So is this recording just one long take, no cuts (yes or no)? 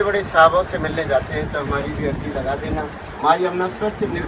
yes